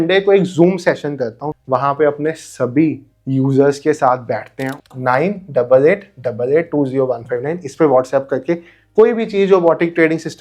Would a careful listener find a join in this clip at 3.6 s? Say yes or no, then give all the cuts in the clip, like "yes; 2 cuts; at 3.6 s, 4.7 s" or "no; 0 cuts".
no; 2 cuts; at 1.5 s, 4.8 s